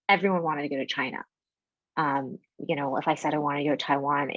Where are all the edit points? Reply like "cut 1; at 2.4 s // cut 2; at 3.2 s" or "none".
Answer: none